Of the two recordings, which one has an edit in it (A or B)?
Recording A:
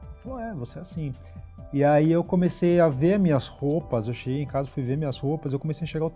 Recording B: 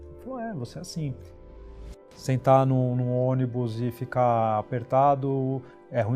B